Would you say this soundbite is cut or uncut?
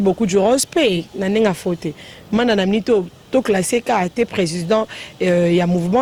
uncut